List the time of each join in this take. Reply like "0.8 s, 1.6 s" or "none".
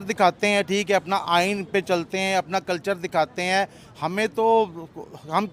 none